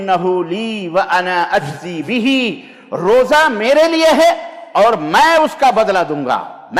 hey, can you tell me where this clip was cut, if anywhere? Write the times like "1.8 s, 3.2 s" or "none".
none